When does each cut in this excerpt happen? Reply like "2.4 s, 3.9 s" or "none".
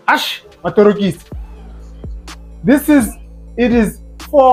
none